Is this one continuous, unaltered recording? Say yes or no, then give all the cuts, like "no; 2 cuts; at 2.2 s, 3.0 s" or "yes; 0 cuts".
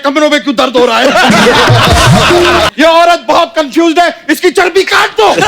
no; 1 cut; at 2.7 s